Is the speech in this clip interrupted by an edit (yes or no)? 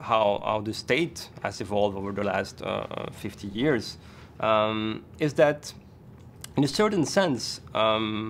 no